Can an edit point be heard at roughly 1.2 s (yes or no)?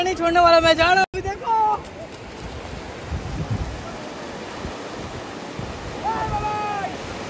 no